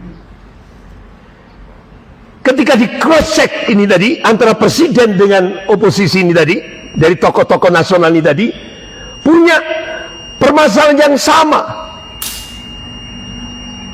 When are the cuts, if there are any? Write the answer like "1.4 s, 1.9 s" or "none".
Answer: none